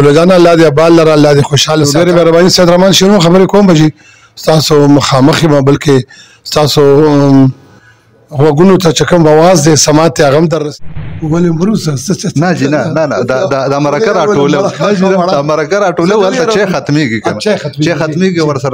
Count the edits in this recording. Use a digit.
2